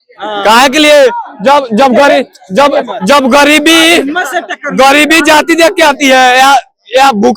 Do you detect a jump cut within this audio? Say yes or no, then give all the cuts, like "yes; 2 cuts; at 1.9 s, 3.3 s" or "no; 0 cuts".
no; 0 cuts